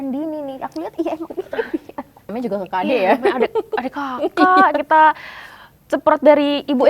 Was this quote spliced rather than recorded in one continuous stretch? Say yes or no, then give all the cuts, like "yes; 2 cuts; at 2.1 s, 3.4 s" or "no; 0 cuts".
yes; 1 cut; at 2.3 s